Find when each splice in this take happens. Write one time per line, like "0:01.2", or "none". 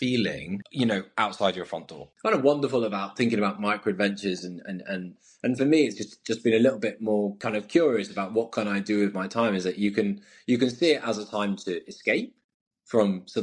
0:02.1